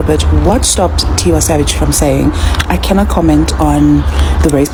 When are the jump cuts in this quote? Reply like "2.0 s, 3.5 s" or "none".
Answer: none